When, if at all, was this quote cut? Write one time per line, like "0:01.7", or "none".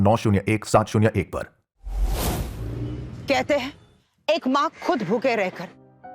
0:02.0
0:03.1